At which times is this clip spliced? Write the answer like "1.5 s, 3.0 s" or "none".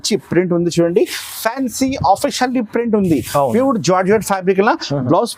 none